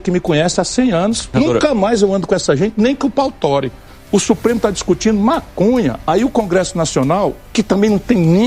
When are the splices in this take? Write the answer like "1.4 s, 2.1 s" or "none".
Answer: 1.3 s, 3.8 s